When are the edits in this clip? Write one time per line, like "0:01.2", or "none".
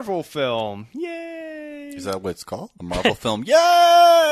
0:02.7